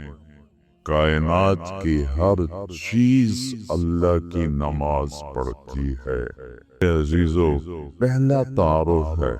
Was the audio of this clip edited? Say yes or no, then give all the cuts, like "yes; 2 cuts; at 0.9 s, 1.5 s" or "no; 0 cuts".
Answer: yes; 1 cut; at 6.8 s